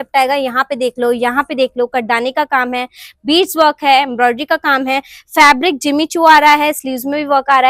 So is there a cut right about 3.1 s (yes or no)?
no